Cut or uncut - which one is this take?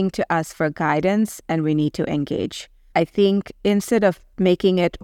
uncut